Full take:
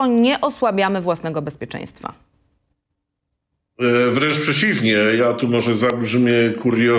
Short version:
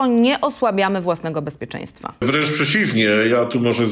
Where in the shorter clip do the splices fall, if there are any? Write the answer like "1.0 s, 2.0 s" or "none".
2.2 s